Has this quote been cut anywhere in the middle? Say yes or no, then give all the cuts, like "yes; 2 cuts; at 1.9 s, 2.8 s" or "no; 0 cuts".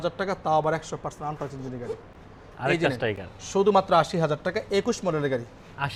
no; 0 cuts